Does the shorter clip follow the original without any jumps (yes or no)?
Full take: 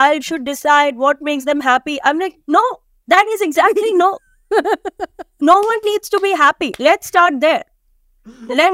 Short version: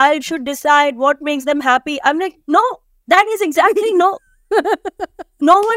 yes